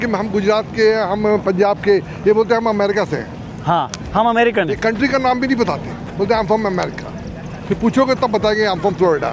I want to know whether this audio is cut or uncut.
uncut